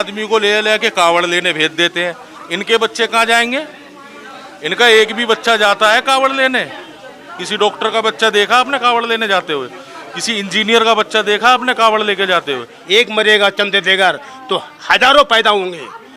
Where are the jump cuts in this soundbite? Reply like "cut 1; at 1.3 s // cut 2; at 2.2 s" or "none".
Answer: cut 1; at 12.8 s